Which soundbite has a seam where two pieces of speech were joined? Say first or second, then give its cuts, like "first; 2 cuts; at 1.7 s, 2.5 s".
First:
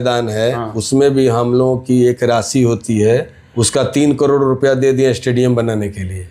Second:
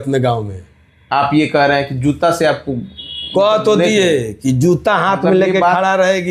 first; 1 cut; at 3.4 s